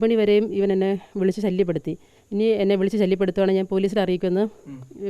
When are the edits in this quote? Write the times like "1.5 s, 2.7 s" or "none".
2.1 s

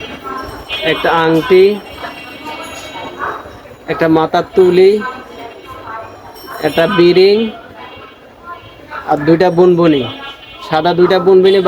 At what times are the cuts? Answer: none

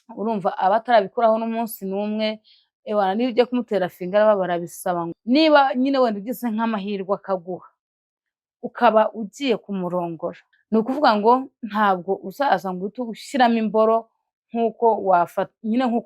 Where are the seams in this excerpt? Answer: 5.1 s, 10.5 s

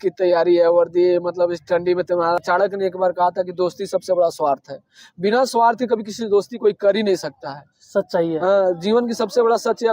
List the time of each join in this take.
2.4 s

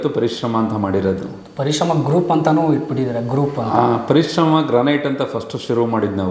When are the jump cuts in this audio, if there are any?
none

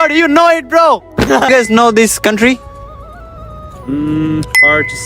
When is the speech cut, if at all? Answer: 1.5 s

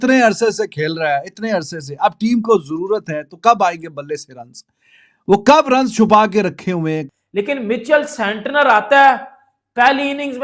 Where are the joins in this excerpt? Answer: 7.1 s

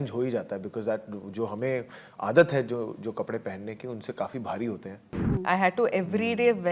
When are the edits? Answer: 5.1 s

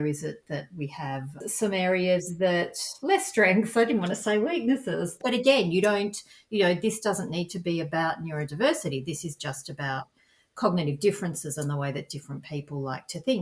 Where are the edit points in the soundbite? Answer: 1.4 s, 5.2 s

